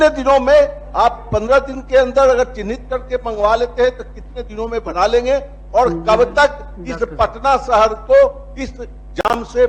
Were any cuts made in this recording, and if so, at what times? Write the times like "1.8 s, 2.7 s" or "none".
none

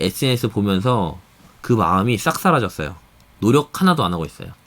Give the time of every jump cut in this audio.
none

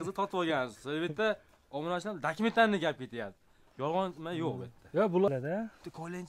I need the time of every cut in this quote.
5.3 s

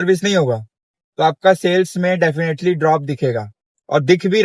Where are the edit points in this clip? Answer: none

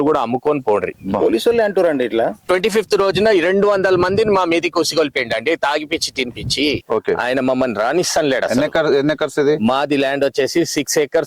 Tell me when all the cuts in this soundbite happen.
1.0 s, 2.4 s, 6.8 s

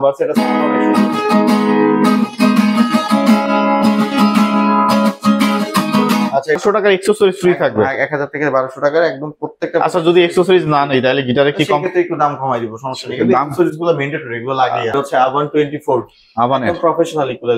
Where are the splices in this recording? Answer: 6.6 s, 14.9 s

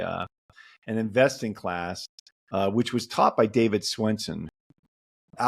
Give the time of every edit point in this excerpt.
4.4 s

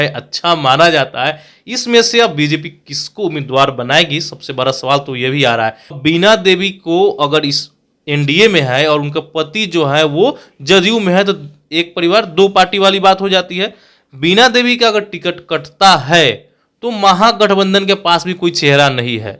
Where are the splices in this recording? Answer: 5.9 s

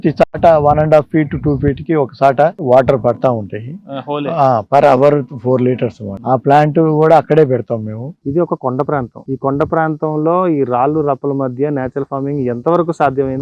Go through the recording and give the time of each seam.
8.1 s

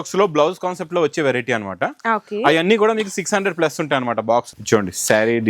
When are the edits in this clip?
4.5 s

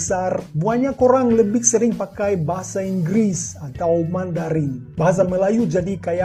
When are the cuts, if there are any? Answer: none

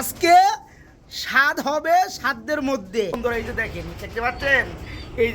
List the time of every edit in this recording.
3.2 s

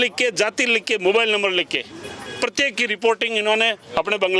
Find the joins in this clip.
none

